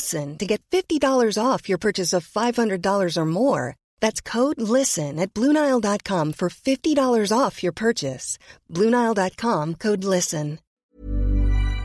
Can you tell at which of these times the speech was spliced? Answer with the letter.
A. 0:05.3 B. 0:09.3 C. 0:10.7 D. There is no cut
C